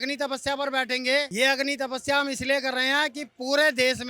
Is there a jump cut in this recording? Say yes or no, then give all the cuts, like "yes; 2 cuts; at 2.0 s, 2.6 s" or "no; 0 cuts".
yes; 1 cut; at 1.3 s